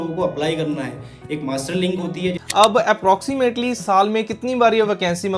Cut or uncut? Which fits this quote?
cut